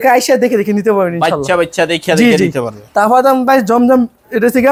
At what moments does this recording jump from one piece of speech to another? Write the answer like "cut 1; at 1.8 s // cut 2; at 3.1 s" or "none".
none